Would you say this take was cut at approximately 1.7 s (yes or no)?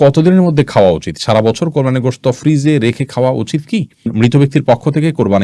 no